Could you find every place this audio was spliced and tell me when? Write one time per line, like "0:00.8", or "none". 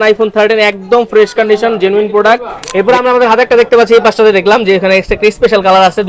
0:02.7